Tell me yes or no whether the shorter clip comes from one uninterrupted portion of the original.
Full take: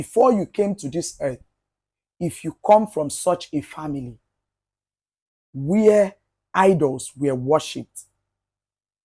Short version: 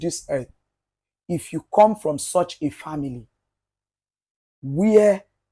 yes